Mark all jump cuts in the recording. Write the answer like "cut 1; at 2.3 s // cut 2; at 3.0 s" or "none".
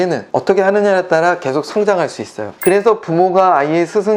cut 1; at 2.4 s

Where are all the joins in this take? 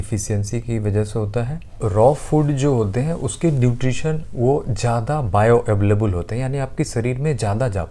cut 1; at 1.8 s

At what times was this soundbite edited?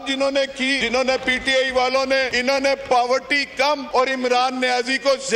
cut 1; at 0.8 s // cut 2; at 2.3 s // cut 3; at 3.8 s

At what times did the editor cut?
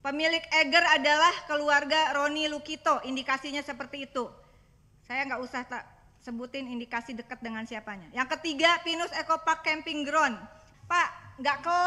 cut 1; at 10.6 s

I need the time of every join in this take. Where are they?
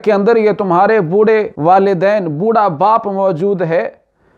cut 1; at 1.5 s

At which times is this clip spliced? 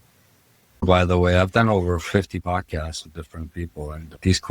cut 1; at 0.8 s // cut 2; at 2.4 s

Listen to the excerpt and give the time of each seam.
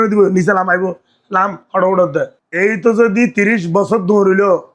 cut 1; at 2.4 s

